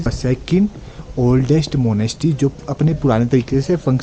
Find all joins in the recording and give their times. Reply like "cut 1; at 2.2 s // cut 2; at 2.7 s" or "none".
none